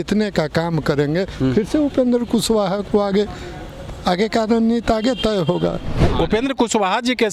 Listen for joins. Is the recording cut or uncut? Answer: cut